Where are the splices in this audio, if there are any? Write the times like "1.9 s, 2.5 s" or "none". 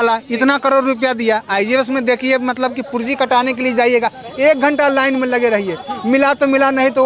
none